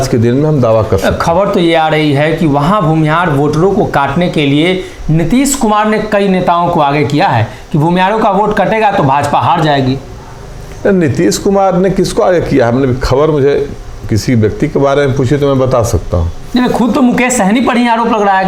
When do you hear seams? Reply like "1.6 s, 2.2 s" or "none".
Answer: none